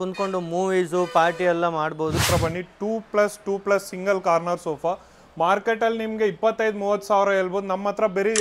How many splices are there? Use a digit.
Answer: 1